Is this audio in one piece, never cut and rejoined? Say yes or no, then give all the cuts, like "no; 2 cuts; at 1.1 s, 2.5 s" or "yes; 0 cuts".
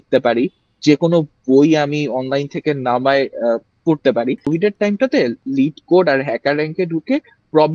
no; 1 cut; at 4.5 s